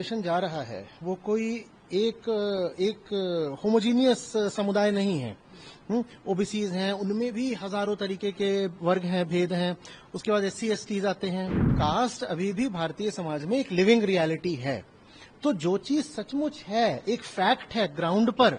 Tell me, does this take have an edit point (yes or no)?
yes